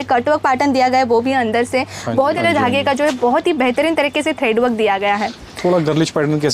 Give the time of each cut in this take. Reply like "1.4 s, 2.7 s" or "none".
2.3 s